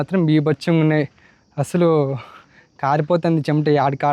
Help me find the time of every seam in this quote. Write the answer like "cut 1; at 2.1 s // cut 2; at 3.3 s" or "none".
none